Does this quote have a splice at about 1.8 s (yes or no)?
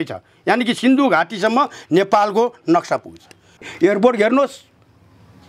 no